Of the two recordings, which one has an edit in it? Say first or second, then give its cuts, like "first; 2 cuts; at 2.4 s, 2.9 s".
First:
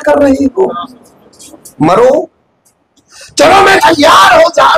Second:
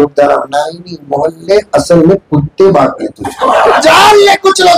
second; 1 cut; at 3.8 s